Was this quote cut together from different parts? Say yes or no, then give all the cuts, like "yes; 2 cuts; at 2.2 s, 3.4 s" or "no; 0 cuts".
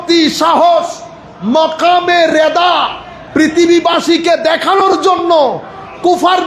no; 0 cuts